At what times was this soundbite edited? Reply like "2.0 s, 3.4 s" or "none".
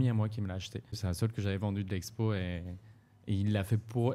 1.0 s